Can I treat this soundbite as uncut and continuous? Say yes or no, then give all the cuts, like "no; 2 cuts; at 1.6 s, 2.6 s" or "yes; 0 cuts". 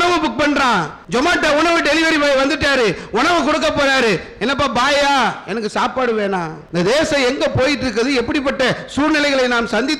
no; 2 cuts; at 1.0 s, 6.6 s